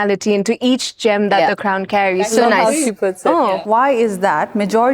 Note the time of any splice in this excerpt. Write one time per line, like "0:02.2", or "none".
0:03.6